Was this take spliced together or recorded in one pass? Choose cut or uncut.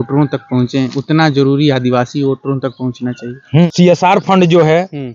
cut